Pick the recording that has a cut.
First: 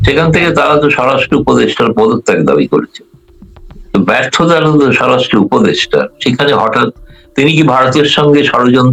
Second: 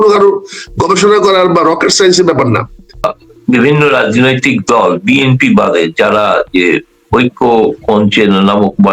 second; 1 cut; at 3.0 s

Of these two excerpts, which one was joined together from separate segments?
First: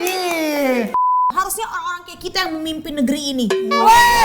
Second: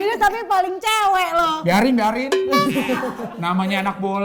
first; 1 cut; at 1.1 s

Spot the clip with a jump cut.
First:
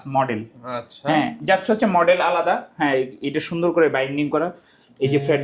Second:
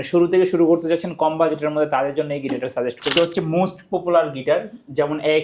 second; 1 cut; at 3.1 s

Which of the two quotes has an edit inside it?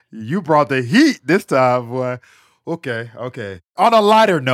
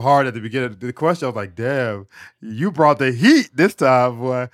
first; 1 cut; at 3.6 s

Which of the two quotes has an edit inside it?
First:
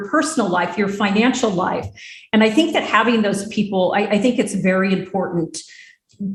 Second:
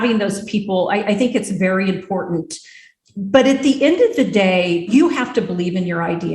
second; 1 cut; at 4.9 s

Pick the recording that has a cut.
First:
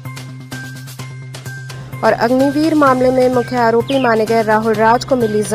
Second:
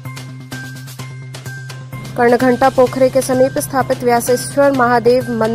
first; 1 cut; at 1.7 s

